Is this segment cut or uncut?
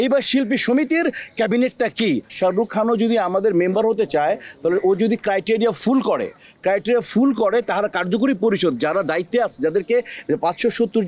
cut